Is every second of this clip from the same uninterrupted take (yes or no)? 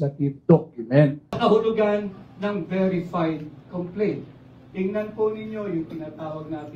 no